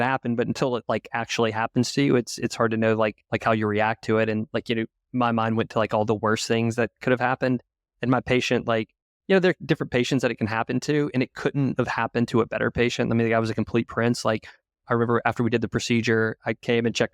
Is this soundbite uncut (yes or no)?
no